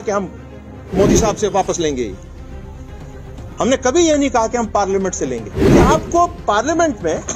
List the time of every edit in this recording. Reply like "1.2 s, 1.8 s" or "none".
2.2 s, 3.6 s, 5.5 s